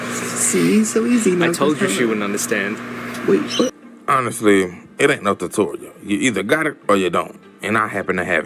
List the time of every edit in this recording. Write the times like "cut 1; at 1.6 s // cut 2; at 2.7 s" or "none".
none

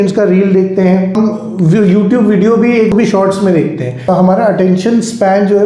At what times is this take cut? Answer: cut 1; at 1.1 s // cut 2; at 2.9 s // cut 3; at 4.1 s

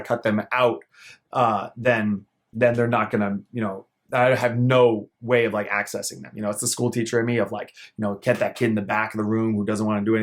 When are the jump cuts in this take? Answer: none

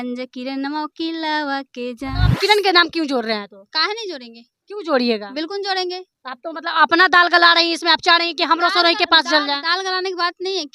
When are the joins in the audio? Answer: cut 1; at 2.2 s

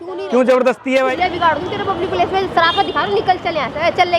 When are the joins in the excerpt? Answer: cut 1; at 1.1 s

